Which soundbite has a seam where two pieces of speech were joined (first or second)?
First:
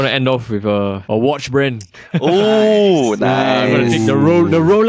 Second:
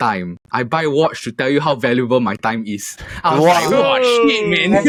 first